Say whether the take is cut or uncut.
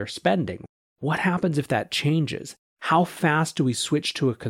uncut